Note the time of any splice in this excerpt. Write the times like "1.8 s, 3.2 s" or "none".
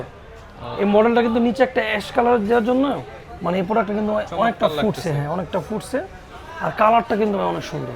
none